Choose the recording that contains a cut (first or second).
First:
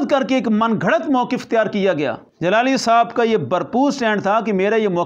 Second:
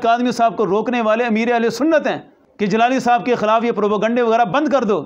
first